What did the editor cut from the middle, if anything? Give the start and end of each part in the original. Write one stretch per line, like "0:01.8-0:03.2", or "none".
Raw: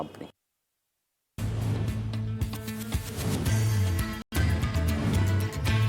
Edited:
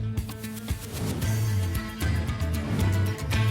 0:04.2-0:04.3